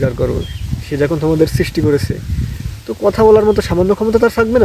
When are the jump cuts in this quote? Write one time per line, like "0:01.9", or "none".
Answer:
none